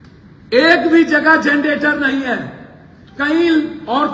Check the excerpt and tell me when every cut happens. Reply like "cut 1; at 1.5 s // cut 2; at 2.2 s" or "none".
none